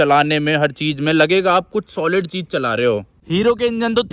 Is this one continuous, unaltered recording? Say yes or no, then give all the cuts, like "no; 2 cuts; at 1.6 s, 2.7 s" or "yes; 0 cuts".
no; 1 cut; at 3.1 s